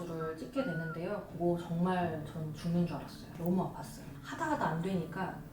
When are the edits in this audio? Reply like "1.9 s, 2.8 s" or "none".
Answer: 4.1 s